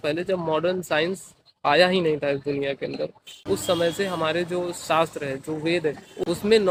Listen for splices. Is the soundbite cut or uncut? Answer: uncut